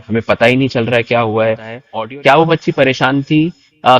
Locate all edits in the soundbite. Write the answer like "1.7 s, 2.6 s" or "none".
1.8 s